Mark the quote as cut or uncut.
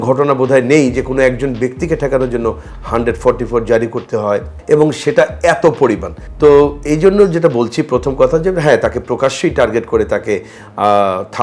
uncut